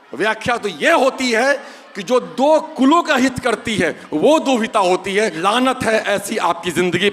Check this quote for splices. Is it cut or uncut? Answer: cut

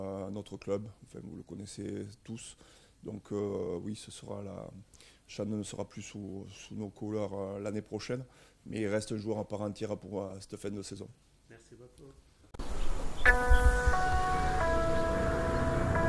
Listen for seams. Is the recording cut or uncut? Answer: cut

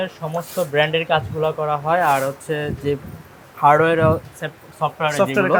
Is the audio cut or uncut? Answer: uncut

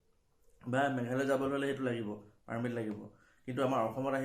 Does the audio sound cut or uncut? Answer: uncut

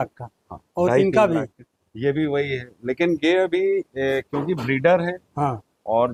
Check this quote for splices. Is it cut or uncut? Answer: uncut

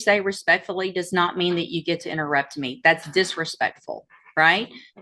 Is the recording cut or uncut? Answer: uncut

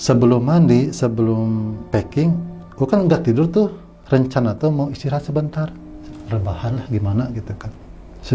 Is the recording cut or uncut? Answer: cut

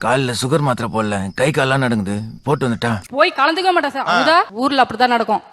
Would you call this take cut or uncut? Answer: cut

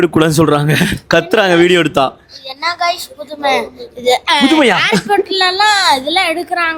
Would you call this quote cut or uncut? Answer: uncut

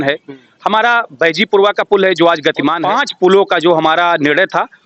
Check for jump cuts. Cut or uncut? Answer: cut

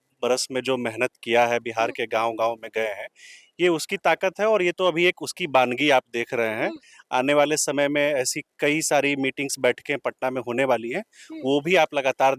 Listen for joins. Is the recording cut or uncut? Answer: uncut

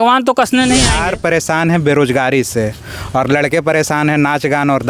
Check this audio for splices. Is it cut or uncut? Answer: cut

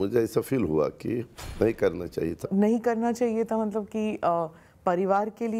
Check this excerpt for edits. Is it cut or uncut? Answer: cut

